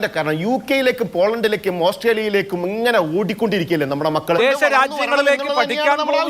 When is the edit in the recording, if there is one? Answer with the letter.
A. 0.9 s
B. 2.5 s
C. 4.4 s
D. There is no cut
C